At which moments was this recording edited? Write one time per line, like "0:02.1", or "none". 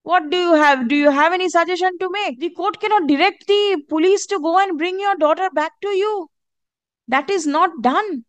0:02.6